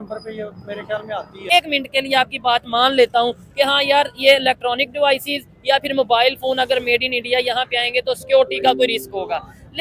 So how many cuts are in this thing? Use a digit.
1